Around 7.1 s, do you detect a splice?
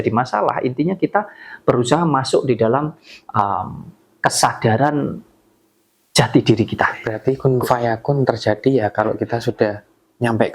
yes; 1 cut; at 7.1 s

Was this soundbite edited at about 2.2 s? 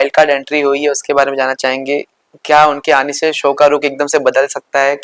no; 0 cuts

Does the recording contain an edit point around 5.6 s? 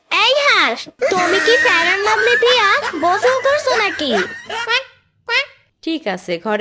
yes; 1 cut; at 5.6 s

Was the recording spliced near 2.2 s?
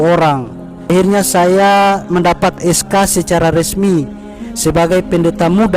no; 1 cut; at 0.9 s

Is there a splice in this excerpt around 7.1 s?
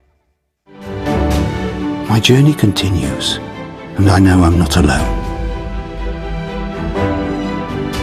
no; 1 cut; at 0.9 s

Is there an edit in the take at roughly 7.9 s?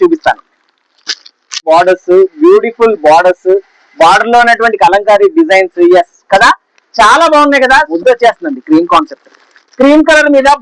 yes; 2 cuts; at 1.6 s, 7.9 s

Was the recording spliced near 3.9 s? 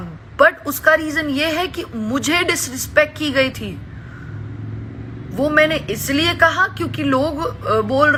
no; 0 cuts

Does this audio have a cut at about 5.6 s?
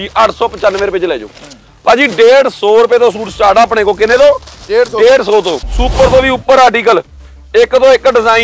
yes; 1 cut; at 5.6 s

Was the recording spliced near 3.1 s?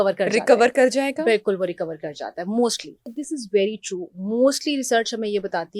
yes; 1 cut; at 3.1 s

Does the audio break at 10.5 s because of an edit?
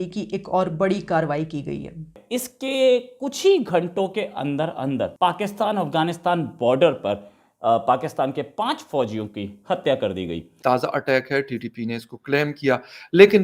yes; 2 cuts; at 2.1 s, 10.5 s

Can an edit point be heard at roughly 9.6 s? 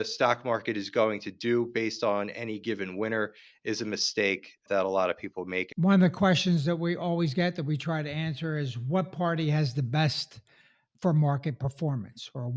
no; 1 cut; at 5.6 s

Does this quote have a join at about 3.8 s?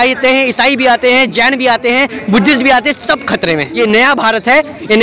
yes; 1 cut; at 3.8 s

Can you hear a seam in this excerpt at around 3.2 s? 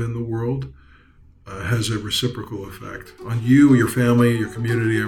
no; 0 cuts

